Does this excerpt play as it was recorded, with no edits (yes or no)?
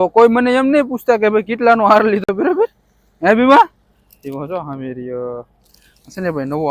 yes